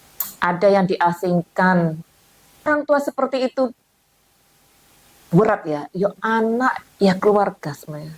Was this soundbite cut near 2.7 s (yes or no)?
yes